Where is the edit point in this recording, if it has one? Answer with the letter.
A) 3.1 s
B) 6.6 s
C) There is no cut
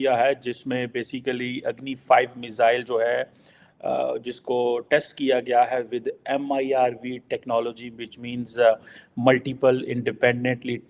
C